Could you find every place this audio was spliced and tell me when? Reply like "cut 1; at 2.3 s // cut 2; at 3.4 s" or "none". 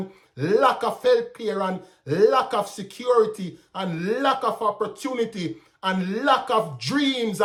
none